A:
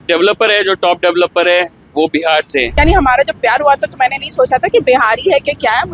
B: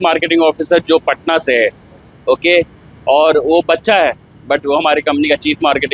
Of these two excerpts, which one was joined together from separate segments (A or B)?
A